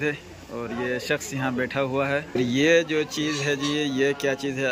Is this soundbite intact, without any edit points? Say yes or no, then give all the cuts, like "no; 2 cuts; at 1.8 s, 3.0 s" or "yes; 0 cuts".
no; 1 cut; at 2.4 s